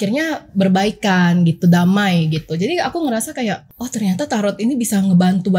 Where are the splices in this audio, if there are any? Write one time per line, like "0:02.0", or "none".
0:03.7